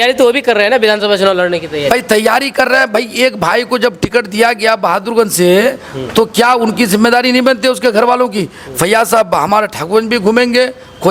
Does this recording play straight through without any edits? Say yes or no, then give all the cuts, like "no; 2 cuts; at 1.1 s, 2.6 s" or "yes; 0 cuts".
yes; 0 cuts